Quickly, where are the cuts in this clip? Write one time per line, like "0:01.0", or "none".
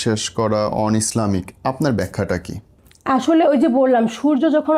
none